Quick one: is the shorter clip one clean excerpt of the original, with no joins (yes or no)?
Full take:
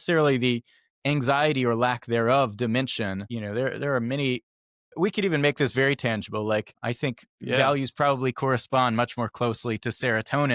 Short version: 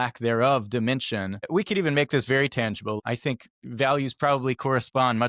no